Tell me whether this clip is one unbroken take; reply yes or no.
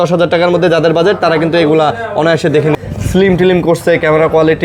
no